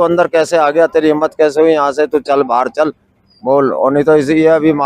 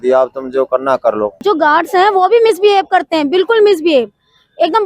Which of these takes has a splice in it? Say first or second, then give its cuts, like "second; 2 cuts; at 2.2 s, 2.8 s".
second; 1 cut; at 1.4 s